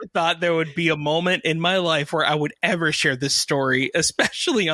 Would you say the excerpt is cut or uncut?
uncut